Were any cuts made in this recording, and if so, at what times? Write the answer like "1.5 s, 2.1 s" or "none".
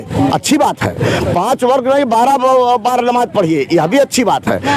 none